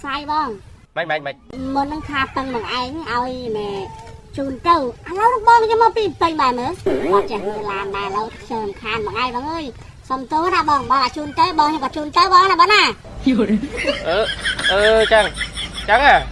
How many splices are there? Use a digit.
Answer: 0